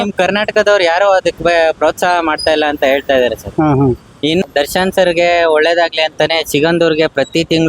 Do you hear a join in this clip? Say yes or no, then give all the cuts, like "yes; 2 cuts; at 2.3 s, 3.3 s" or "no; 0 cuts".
yes; 1 cut; at 4.4 s